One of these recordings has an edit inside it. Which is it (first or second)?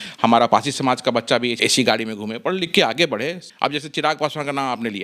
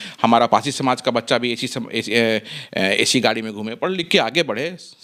first